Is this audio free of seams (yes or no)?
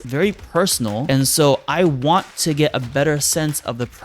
no